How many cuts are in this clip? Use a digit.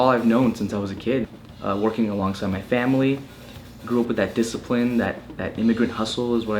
1